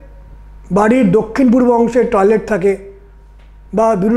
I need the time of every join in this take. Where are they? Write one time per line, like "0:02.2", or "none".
none